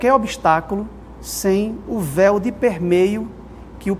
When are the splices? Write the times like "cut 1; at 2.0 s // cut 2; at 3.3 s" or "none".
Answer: none